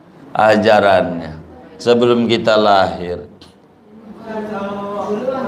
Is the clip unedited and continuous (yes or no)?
yes